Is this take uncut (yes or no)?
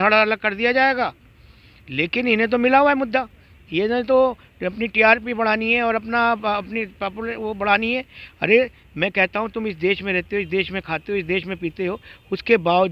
yes